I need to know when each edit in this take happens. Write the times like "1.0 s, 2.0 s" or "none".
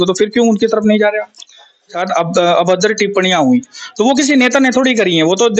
2.0 s